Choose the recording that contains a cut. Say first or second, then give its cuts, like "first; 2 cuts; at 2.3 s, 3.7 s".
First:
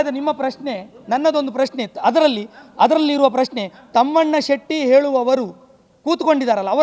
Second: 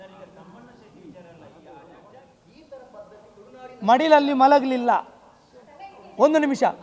second; 1 cut; at 2.0 s